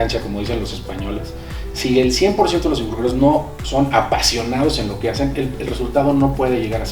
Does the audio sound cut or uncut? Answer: uncut